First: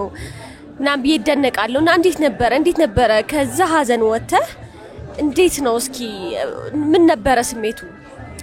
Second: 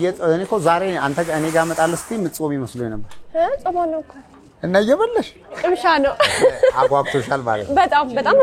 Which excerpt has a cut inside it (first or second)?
second